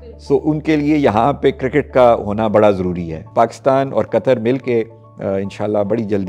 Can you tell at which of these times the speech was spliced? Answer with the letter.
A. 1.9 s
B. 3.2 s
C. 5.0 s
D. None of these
B